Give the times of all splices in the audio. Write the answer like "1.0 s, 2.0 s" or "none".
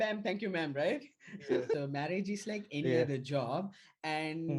1.7 s